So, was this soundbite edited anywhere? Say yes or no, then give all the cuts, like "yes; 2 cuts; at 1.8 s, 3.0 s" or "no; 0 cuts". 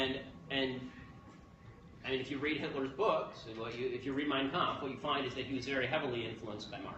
no; 0 cuts